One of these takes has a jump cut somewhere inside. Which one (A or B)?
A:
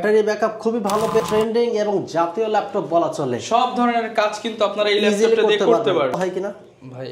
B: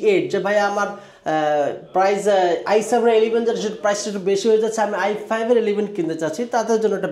A